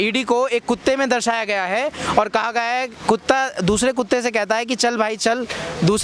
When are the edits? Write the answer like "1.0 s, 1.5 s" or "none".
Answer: none